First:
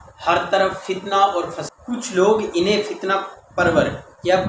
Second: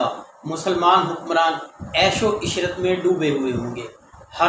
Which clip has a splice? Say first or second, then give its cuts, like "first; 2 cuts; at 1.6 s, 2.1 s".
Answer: first; 1 cut; at 1.6 s